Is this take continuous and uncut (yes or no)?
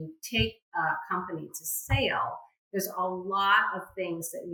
yes